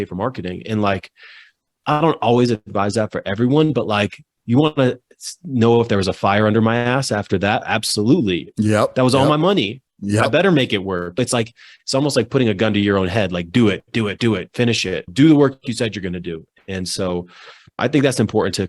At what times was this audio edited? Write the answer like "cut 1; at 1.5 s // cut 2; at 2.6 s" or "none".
cut 1; at 11.2 s // cut 2; at 15.1 s // cut 3; at 17.8 s